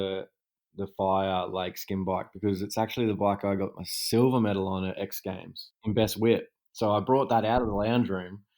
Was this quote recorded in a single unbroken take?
no; 1 cut; at 5.8 s

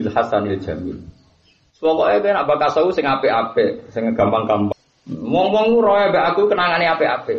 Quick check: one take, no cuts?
no; 1 cut; at 4.7 s

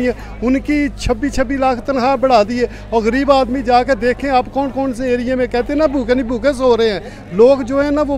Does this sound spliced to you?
no; 0 cuts

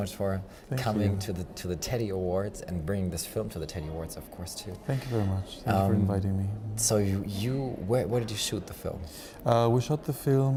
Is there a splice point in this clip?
no; 0 cuts

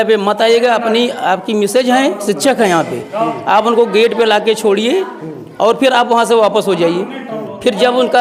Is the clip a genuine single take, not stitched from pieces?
yes; 0 cuts

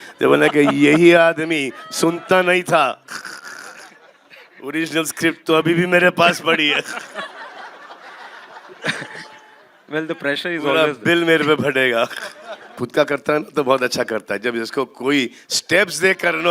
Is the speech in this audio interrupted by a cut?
yes; 1 cut; at 12.8 s

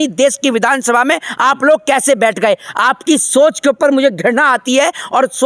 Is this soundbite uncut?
yes; 0 cuts

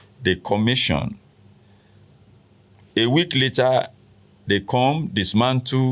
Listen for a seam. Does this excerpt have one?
no; 0 cuts

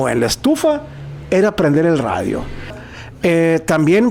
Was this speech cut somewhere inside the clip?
yes; 1 cut; at 2.8 s

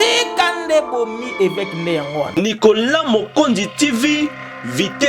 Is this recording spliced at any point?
yes; 1 cut; at 2.3 s

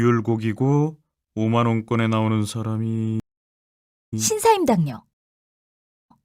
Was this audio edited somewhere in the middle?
no; 0 cuts

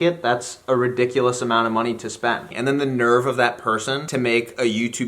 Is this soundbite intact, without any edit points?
no; 2 cuts; at 2.5 s, 4.0 s

